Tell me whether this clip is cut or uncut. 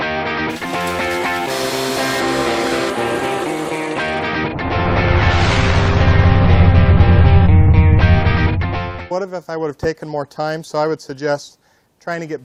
uncut